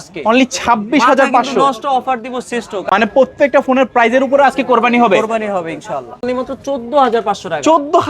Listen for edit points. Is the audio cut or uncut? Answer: cut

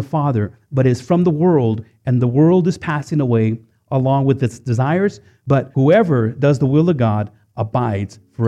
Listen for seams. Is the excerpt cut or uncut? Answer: cut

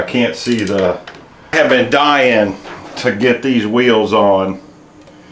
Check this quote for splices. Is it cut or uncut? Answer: cut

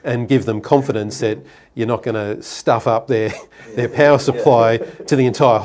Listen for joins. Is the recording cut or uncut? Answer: uncut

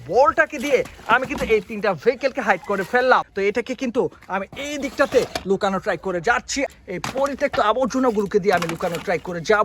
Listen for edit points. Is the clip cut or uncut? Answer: cut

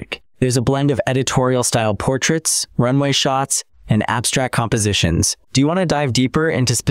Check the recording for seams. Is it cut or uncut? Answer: cut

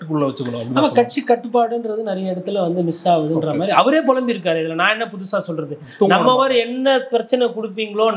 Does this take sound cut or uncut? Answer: uncut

